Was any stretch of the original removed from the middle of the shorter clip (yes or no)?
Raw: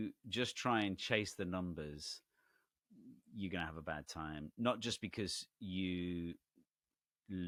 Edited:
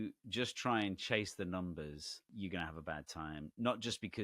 yes